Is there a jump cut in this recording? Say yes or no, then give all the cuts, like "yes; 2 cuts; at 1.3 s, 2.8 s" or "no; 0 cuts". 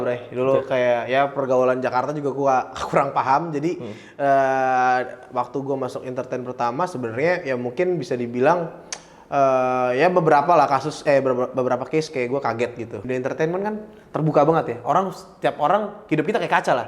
yes; 1 cut; at 13.0 s